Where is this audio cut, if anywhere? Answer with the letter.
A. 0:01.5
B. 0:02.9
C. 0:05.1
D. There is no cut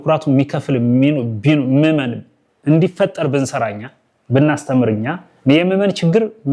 D